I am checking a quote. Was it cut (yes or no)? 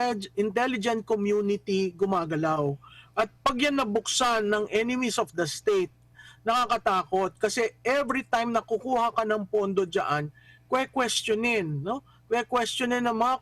no